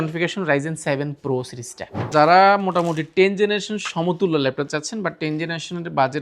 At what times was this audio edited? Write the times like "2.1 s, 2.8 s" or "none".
2.0 s